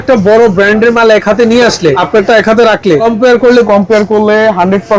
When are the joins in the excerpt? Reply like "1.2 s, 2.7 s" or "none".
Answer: 2.0 s, 3.0 s